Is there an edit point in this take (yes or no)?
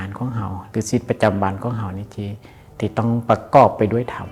no